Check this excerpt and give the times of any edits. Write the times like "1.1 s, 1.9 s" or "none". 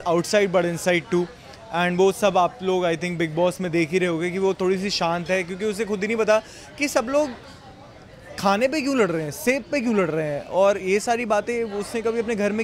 none